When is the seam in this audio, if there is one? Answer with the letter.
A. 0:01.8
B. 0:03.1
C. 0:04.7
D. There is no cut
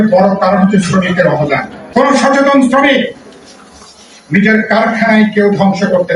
A